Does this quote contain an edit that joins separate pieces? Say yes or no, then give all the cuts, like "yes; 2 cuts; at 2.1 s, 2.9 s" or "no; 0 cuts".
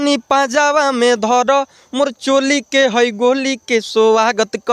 no; 0 cuts